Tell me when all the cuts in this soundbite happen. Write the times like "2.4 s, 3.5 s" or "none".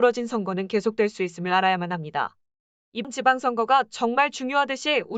3.0 s